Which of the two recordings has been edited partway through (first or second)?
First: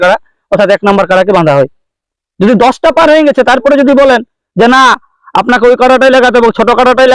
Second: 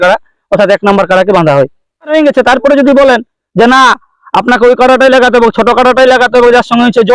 second